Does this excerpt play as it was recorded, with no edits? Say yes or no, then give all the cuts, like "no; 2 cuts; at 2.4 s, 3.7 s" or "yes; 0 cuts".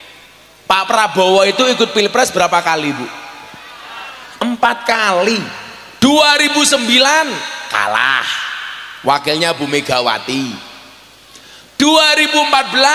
yes; 0 cuts